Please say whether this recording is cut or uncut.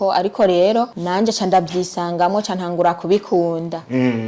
cut